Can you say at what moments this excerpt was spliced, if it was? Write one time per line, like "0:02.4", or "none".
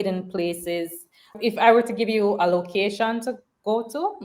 0:01.3